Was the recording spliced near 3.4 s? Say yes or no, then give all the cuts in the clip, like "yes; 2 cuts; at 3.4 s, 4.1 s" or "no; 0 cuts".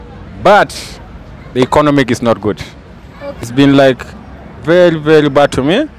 yes; 1 cut; at 3.4 s